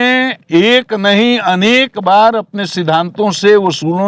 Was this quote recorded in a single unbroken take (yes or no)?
yes